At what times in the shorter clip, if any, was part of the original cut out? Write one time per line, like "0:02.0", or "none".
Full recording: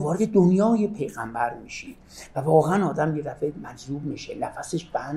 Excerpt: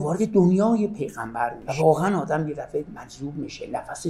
0:01.6